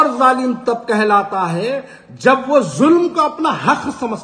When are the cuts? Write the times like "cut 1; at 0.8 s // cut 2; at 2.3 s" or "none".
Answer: none